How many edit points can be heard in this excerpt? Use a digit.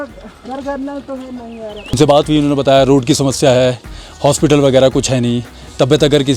1